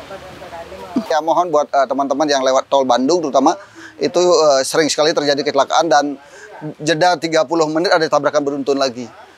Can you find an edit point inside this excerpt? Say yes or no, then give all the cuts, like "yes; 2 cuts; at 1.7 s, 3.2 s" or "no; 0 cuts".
yes; 1 cut; at 1.0 s